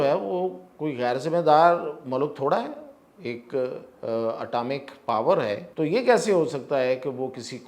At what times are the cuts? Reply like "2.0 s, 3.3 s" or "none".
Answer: 5.7 s